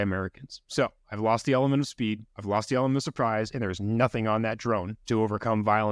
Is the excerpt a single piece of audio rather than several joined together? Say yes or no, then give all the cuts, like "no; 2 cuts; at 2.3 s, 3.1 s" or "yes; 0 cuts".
no; 2 cuts; at 2.3 s, 4.9 s